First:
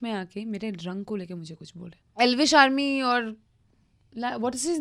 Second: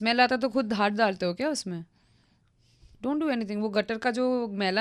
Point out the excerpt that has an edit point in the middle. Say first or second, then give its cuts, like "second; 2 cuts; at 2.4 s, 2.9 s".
first; 1 cut; at 2.1 s